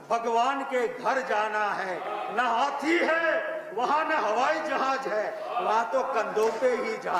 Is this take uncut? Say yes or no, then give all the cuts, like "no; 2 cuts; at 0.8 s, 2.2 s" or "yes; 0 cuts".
yes; 0 cuts